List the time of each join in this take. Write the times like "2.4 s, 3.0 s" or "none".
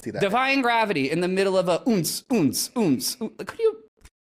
none